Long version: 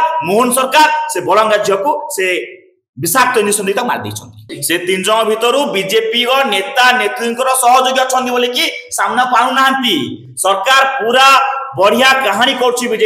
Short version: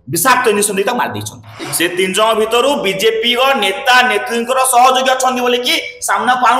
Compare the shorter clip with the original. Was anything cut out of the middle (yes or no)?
no